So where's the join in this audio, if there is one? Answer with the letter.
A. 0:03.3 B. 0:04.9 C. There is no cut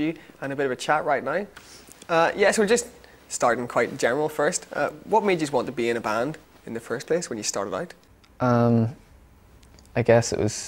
A